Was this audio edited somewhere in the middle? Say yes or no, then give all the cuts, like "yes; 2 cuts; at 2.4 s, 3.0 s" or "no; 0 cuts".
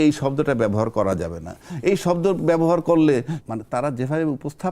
yes; 1 cut; at 3.3 s